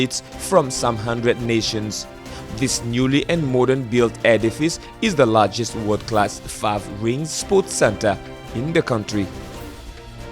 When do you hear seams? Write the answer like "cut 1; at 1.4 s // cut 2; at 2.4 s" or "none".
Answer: cut 1; at 9.3 s